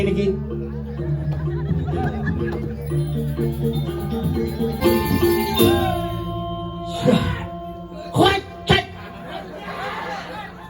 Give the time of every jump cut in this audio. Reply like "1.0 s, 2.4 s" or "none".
4.8 s

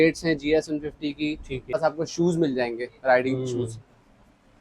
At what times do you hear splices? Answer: 1.7 s

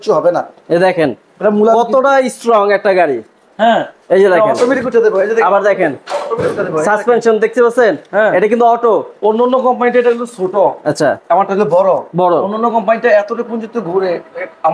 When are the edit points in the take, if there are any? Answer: none

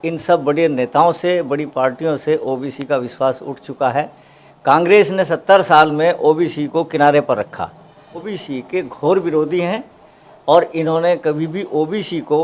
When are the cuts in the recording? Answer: 8.3 s

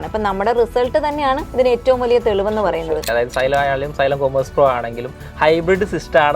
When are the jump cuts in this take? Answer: 1.5 s, 3.1 s

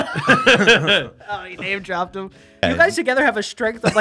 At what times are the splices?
2.6 s

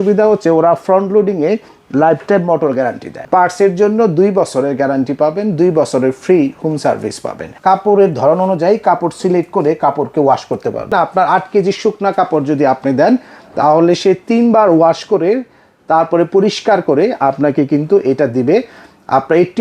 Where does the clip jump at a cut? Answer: 3.1 s, 7.5 s, 10.9 s

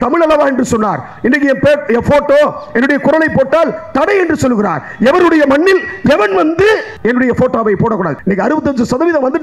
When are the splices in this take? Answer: 6.9 s, 8.1 s

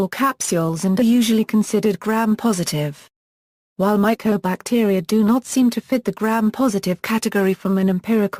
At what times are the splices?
none

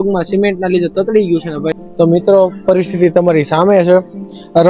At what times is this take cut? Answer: 1.8 s

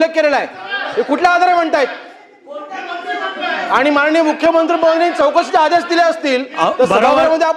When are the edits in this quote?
none

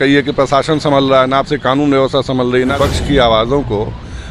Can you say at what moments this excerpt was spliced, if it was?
2.7 s

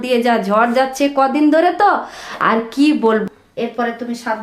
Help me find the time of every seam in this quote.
3.2 s

